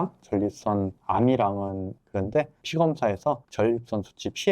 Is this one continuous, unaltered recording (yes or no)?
no